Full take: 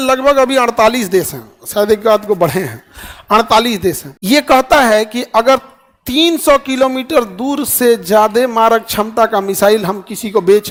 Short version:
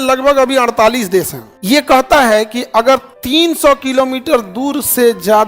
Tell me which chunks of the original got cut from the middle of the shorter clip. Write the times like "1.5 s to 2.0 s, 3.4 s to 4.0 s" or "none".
1.5 s to 4.1 s, 5.7 s to 6.0 s